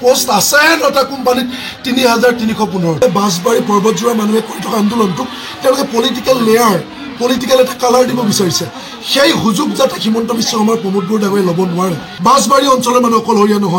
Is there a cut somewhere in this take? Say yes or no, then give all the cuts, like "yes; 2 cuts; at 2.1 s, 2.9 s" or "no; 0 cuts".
yes; 2 cuts; at 3.0 s, 12.1 s